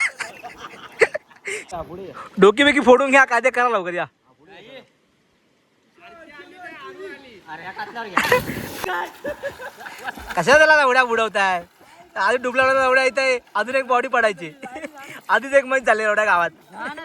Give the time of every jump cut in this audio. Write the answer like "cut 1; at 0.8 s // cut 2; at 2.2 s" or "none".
cut 1; at 1.7 s // cut 2; at 8.8 s